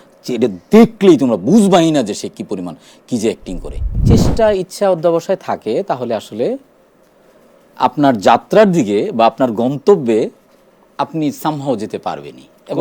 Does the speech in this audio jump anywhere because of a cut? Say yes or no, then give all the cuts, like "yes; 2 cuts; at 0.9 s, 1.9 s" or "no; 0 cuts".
yes; 1 cut; at 4.0 s